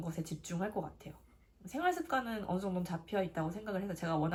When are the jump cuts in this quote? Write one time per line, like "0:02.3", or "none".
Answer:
none